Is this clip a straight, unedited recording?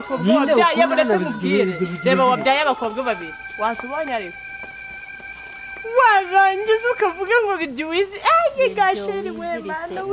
yes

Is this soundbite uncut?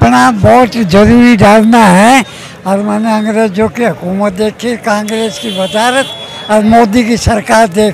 yes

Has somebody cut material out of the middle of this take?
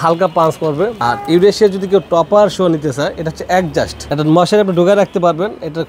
yes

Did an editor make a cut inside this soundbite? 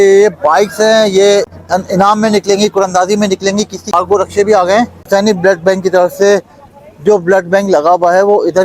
yes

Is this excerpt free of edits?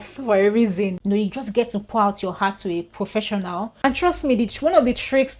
no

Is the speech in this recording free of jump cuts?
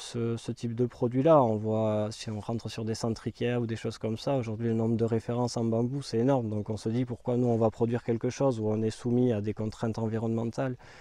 yes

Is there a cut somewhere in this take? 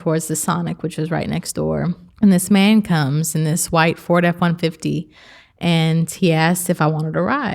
yes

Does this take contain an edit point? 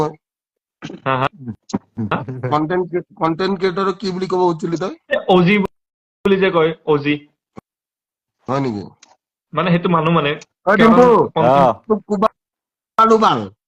no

